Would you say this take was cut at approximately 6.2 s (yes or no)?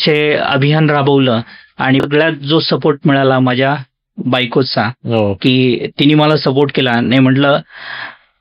no